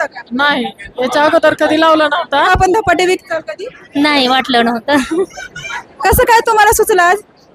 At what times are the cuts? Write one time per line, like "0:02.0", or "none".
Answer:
0:02.5